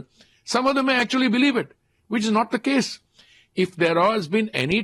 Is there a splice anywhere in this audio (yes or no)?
no